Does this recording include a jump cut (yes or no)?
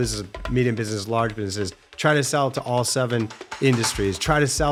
no